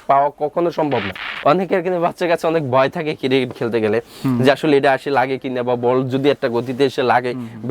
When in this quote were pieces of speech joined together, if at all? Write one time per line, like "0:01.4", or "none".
0:01.2